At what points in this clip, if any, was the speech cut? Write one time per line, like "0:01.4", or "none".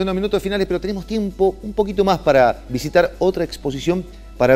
none